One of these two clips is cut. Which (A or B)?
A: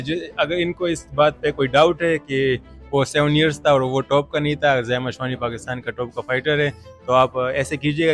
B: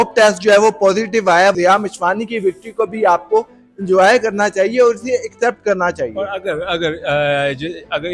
B